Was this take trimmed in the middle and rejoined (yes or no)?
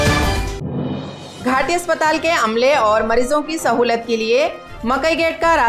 yes